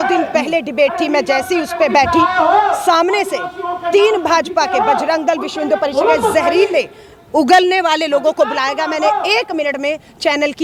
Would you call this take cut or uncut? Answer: uncut